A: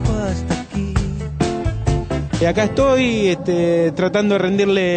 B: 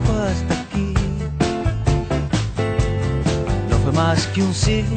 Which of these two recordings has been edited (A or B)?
A